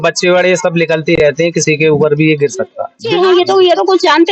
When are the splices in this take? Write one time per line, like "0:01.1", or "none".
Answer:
0:03.1